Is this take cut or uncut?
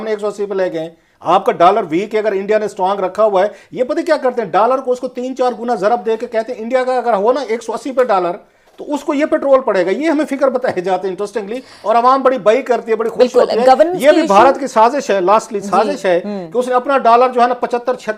uncut